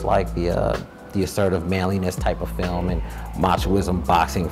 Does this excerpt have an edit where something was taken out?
no; 0 cuts

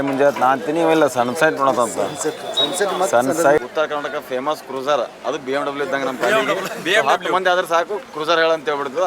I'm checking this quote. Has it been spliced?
yes; 1 cut; at 3.6 s

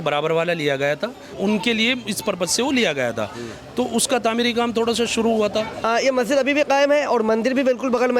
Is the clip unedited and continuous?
no; 2 cuts; at 1.4 s, 5.8 s

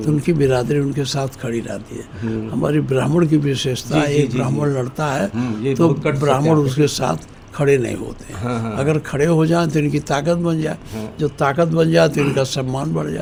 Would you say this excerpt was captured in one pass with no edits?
yes; 0 cuts

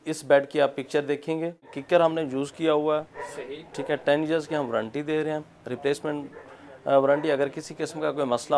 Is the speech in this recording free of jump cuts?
no; 1 cut; at 1.8 s

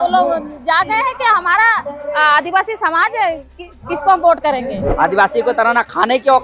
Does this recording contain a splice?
yes; 1 cut; at 4.9 s

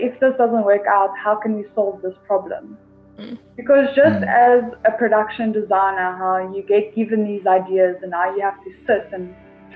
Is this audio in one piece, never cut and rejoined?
yes; 0 cuts

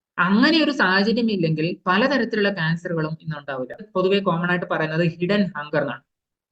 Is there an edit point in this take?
yes; 1 cut; at 3.9 s

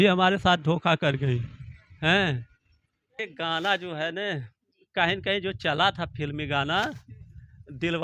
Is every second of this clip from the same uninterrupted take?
no; 1 cut; at 3.2 s

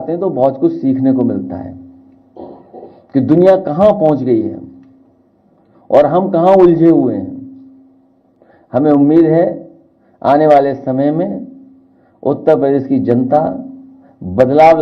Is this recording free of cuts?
yes; 0 cuts

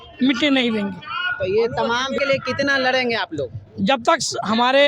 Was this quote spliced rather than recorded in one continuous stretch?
yes; 1 cut; at 2.2 s

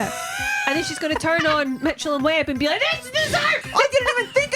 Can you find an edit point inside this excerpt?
yes; 1 cut; at 3.6 s

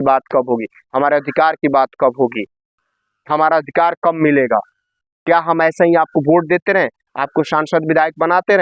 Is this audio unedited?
yes; 0 cuts

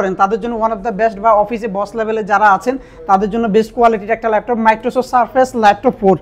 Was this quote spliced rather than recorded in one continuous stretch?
no; 0 cuts

